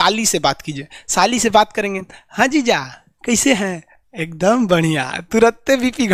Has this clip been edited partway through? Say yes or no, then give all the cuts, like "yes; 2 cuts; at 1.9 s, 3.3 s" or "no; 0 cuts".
no; 0 cuts